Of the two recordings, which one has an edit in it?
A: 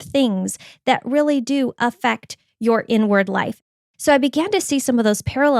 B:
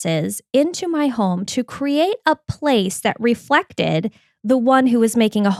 A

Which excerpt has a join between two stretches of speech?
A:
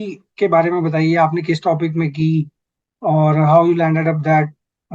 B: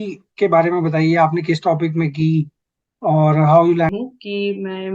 B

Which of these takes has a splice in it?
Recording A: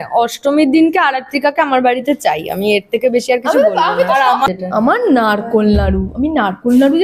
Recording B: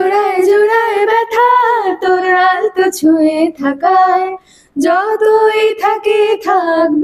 A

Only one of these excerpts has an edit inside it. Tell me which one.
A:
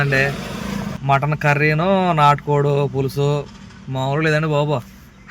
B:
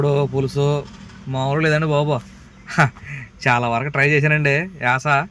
A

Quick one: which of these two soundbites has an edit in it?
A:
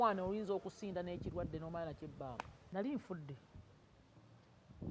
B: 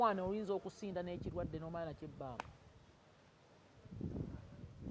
A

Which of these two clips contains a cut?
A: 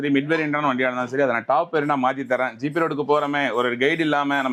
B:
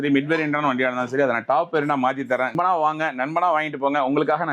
B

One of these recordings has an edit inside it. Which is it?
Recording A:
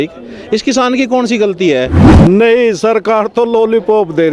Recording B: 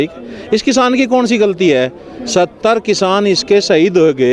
A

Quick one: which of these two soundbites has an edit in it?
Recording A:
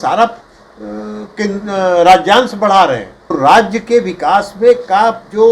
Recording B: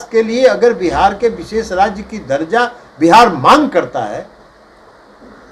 A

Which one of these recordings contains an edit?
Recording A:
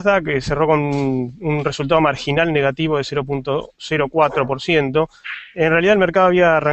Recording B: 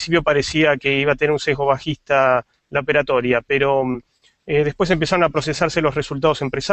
A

